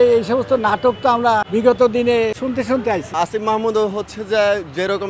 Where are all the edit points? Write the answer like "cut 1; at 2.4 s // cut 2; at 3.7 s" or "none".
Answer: cut 1; at 1.5 s // cut 2; at 2.7 s